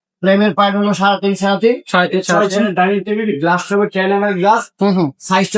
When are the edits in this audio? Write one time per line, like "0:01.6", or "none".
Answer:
none